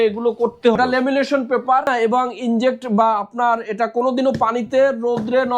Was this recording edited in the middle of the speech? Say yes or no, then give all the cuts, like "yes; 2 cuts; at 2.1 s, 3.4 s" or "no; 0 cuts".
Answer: yes; 2 cuts; at 0.7 s, 1.9 s